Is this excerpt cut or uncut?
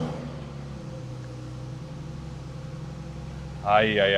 uncut